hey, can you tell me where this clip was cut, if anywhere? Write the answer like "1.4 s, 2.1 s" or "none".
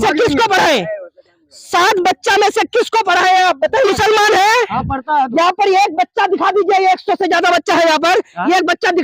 3.9 s